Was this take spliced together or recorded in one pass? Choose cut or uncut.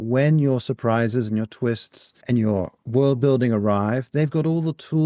cut